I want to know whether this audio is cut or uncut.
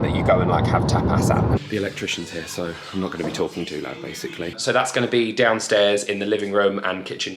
cut